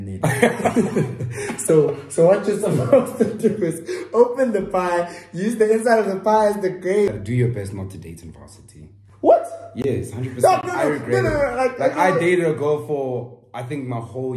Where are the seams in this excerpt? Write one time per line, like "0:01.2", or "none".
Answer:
0:07.1